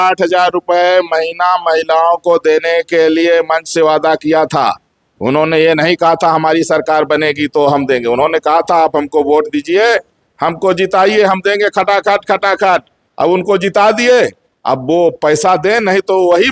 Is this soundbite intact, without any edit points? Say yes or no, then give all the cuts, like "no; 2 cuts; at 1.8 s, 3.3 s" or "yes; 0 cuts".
yes; 0 cuts